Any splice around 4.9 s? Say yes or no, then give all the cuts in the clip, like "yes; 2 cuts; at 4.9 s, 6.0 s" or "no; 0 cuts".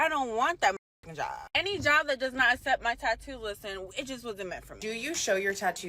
yes; 1 cut; at 4.9 s